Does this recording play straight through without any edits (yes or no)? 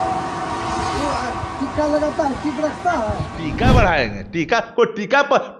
no